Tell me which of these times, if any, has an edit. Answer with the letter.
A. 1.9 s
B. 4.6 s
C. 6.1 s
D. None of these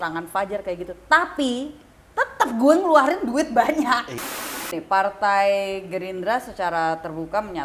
B